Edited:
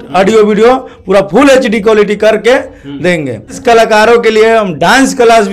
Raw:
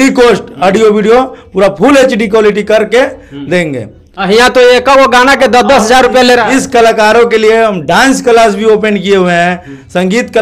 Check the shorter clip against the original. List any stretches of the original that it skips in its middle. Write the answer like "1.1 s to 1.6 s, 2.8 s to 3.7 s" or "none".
4.0 s to 6.6 s